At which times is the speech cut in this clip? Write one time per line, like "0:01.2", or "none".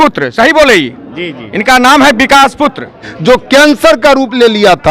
0:03.1